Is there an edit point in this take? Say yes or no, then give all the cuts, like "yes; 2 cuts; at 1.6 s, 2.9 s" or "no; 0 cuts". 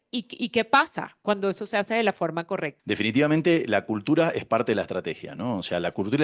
yes; 1 cut; at 2.7 s